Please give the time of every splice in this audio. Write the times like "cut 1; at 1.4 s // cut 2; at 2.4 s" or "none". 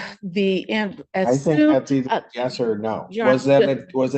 none